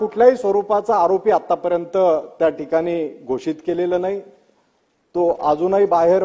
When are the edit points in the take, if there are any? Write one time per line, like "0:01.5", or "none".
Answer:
none